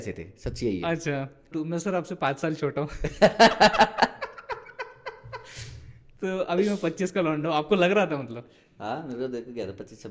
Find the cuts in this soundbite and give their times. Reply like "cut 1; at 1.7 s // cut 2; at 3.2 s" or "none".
cut 1; at 1.5 s

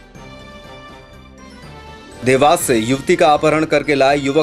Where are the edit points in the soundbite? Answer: cut 1; at 2.2 s

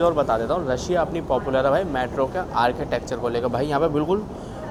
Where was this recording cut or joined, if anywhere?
none

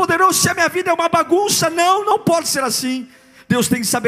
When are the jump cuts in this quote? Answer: none

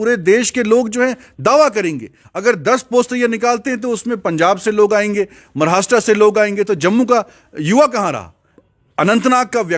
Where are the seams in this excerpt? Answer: cut 1; at 8.5 s

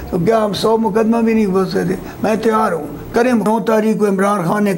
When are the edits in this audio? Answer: cut 1; at 3.4 s

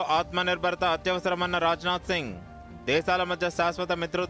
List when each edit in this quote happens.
none

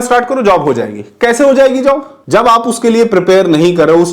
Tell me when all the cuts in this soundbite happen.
none

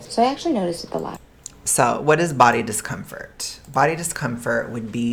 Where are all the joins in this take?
none

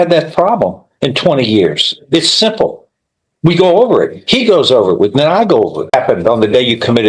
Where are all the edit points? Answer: cut 1; at 5.9 s

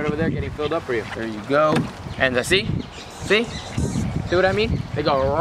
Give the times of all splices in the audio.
cut 1; at 1.1 s

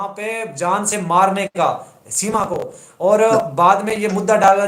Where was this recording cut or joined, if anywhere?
none

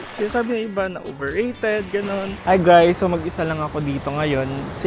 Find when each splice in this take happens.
cut 1; at 2.4 s

